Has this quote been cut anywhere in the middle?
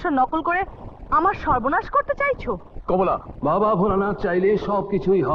yes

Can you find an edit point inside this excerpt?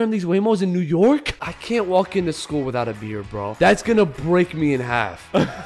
yes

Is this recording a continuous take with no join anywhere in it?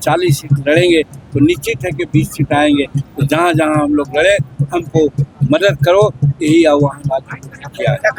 yes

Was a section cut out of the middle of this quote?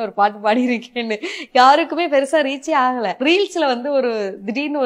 yes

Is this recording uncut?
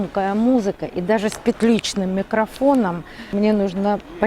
no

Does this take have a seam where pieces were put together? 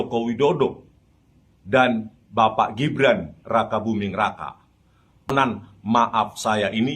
yes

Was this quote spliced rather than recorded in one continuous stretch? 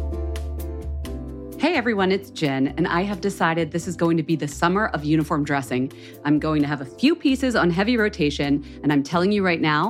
yes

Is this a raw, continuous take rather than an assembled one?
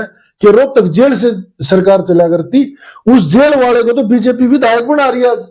yes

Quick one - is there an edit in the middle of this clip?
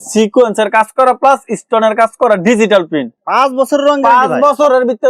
yes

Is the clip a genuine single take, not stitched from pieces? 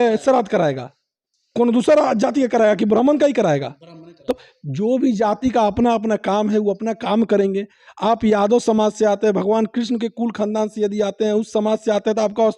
yes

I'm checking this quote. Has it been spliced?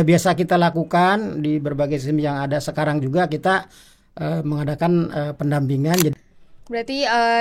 yes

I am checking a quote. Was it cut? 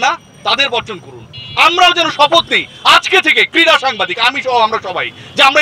no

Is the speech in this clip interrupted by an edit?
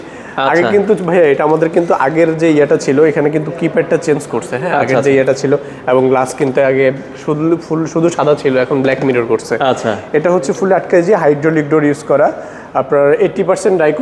no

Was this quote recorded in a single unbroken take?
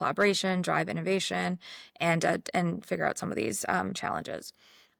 yes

